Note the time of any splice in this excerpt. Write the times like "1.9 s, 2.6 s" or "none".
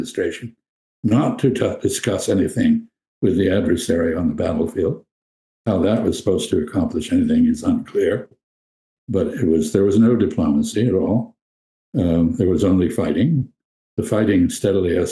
none